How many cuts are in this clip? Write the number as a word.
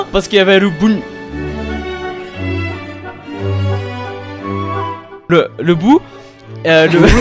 zero